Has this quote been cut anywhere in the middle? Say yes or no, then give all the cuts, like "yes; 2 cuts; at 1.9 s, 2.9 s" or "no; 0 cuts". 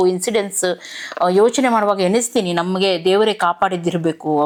no; 0 cuts